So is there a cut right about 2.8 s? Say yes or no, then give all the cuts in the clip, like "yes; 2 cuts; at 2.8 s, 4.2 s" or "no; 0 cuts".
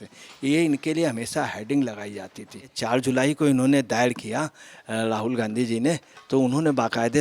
yes; 1 cut; at 2.8 s